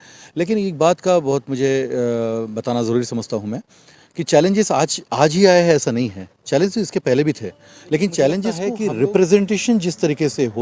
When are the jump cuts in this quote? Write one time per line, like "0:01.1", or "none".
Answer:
0:08.7